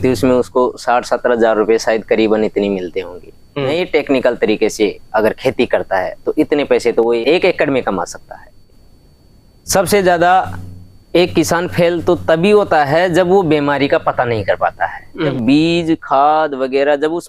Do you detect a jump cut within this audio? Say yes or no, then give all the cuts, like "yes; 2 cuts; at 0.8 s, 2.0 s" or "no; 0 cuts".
yes; 4 cuts; at 3.7 s, 7.2 s, 8.5 s, 15.3 s